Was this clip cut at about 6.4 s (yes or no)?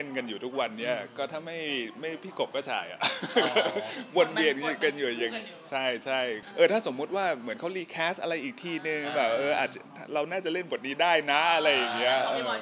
yes